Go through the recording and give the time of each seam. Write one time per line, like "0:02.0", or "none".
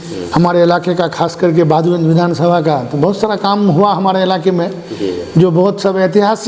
none